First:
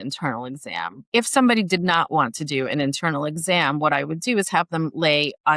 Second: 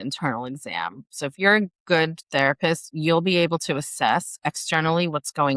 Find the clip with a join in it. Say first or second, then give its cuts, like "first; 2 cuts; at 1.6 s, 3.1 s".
first; 1 cut; at 1.1 s